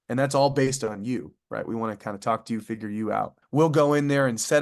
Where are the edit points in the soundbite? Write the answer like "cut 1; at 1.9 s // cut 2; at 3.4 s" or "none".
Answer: cut 1; at 3.4 s